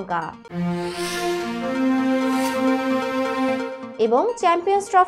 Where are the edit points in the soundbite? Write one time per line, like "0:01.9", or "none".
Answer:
none